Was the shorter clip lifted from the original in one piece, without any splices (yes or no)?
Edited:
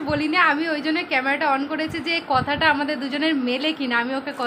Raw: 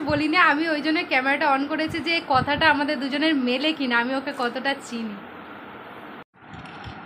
yes